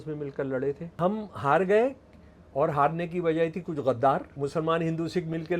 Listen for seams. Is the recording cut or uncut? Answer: cut